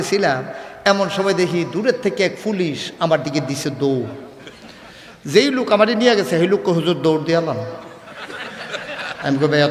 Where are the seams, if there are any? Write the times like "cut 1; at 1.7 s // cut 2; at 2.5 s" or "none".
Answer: none